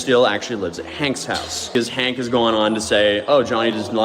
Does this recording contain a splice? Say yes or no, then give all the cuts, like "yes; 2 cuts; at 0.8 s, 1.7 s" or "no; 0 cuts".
yes; 1 cut; at 1.7 s